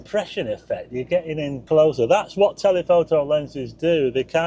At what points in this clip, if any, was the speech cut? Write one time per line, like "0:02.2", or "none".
0:01.6